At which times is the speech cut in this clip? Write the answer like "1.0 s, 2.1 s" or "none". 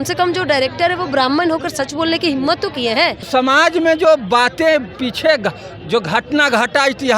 3.2 s

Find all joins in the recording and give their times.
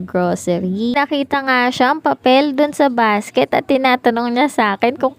0.9 s

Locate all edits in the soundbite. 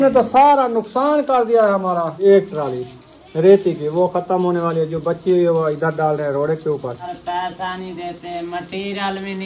2.2 s, 7.0 s

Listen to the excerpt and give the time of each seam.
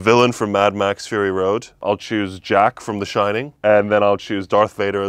1.8 s, 3.5 s

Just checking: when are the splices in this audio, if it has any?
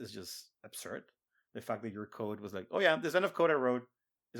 none

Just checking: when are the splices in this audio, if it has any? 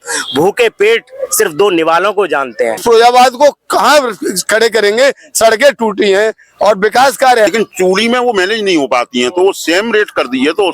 2.8 s, 7.5 s

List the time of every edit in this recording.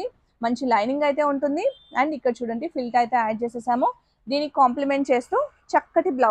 none

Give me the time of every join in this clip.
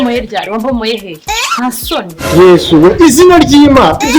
2.2 s

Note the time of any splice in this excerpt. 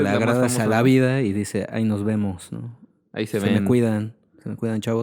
none

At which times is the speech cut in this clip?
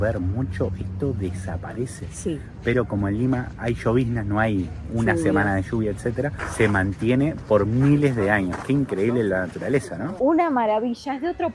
6.4 s, 10.1 s

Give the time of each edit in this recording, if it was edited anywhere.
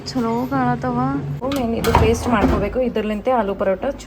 1.3 s

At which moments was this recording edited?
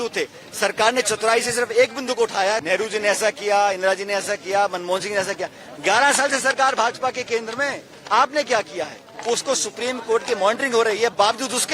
2.6 s, 9.1 s

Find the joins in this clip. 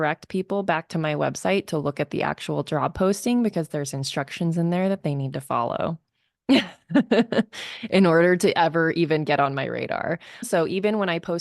10.5 s

